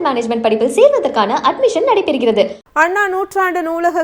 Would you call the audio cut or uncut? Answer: cut